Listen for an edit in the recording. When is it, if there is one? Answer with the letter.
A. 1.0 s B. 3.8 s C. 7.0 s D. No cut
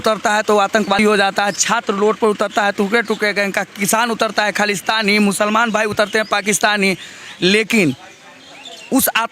A